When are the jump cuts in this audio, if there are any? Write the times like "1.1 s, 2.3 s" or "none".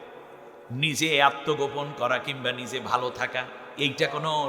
none

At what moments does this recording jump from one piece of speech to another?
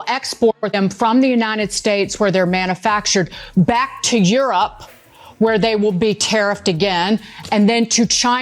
none

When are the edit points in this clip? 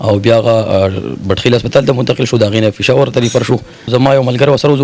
3.9 s

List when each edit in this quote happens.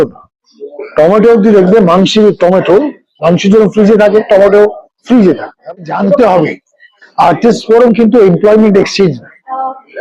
5.7 s

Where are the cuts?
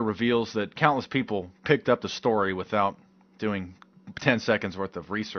2.7 s

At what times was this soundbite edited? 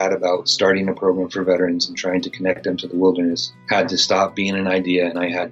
3.5 s

